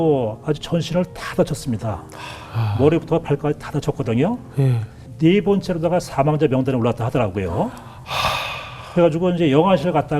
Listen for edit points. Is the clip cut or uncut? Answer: cut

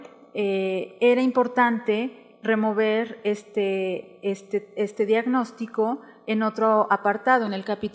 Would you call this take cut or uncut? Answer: uncut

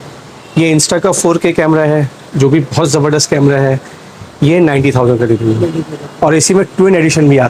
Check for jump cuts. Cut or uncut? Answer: uncut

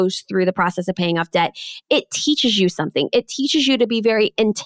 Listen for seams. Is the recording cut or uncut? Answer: uncut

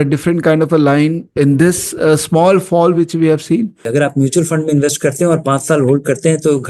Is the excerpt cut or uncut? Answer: cut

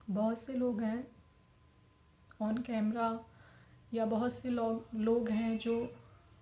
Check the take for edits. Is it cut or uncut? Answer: uncut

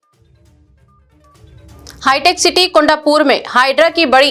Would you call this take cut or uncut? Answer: cut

